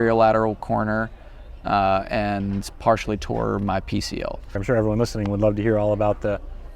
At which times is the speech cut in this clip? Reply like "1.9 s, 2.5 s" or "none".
4.6 s